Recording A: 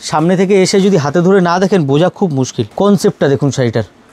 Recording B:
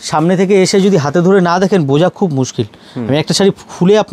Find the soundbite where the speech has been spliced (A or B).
A